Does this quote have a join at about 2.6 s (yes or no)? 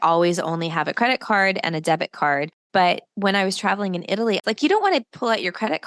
yes